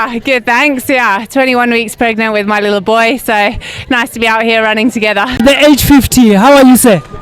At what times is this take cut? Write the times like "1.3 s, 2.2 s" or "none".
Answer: 5.4 s